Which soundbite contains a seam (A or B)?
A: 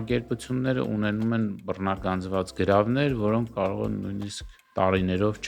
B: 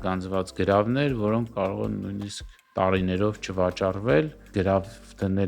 B